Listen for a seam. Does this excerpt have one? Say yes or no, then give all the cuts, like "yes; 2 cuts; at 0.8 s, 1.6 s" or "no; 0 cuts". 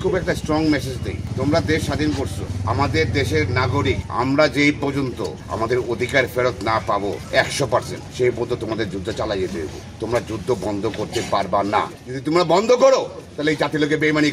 yes; 7 cuts; at 1.2 s, 2.5 s, 4.1 s, 5.4 s, 7.7 s, 9.8 s, 12.0 s